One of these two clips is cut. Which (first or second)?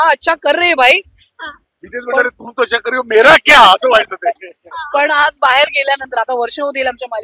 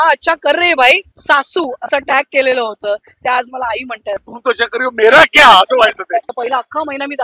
second